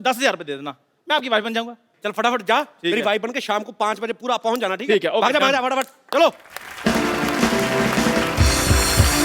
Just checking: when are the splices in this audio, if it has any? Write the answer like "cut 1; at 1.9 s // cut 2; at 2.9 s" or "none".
none